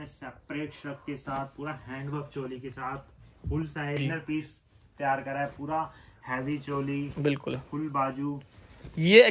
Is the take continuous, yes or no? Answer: no